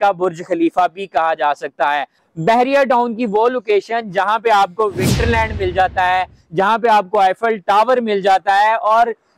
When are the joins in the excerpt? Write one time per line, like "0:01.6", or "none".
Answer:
0:02.2